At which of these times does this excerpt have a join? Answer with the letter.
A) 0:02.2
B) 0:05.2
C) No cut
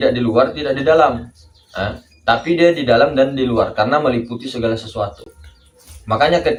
C